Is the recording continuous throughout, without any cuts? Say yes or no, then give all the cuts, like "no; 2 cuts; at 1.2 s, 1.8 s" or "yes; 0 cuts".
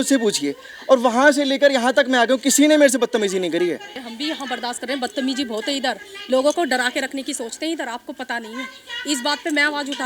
no; 1 cut; at 4.0 s